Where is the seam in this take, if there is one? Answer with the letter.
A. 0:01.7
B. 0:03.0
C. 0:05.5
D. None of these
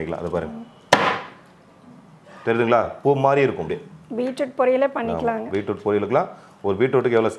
D